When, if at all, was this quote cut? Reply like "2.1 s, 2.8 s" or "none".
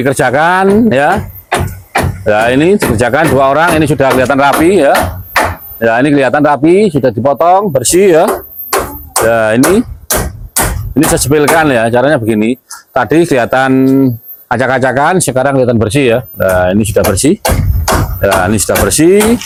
none